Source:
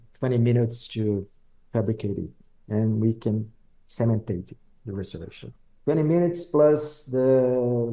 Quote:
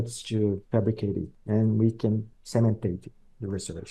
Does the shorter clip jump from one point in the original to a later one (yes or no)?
yes